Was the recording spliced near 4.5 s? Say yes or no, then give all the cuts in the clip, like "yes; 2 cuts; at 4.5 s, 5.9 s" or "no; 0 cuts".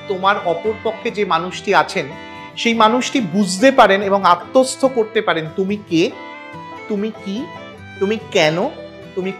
no; 0 cuts